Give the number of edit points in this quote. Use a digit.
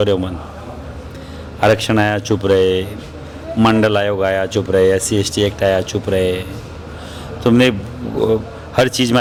0